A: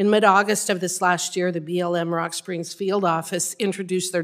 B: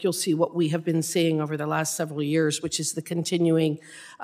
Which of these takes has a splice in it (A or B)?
B